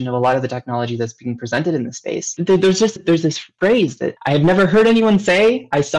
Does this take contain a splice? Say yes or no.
yes